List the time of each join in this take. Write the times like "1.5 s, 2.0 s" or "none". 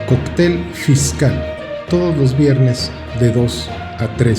1.5 s